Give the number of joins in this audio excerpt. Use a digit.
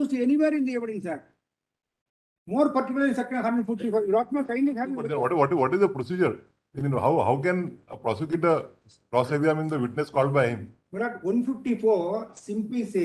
1